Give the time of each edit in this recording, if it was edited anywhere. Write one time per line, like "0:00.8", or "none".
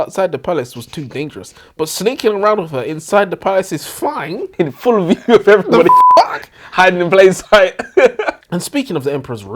0:08.5